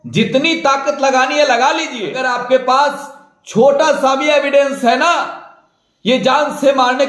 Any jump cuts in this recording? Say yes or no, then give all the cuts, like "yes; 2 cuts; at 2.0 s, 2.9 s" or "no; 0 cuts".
yes; 1 cut; at 2.3 s